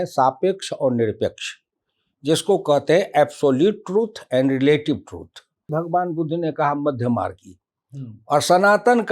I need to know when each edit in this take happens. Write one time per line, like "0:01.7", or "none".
0:05.7